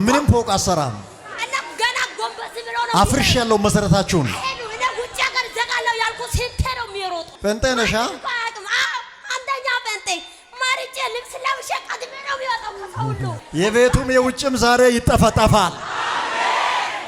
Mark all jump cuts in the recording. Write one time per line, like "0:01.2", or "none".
0:07.3
0:13.4